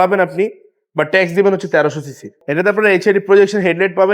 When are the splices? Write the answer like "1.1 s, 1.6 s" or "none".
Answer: 2.3 s